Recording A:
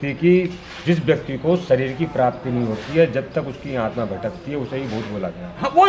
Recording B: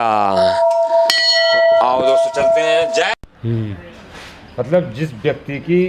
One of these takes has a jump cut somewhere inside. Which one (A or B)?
B